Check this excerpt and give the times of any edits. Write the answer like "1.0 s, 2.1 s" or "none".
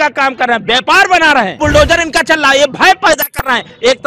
1.5 s